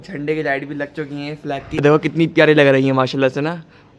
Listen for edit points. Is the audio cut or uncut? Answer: cut